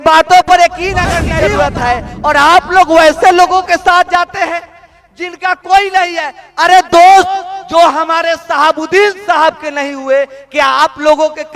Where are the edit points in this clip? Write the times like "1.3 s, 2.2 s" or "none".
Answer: 1.3 s